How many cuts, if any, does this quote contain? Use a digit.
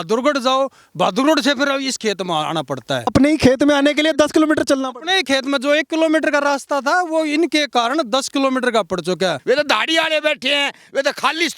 2